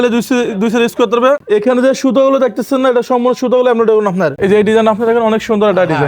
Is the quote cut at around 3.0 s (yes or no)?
no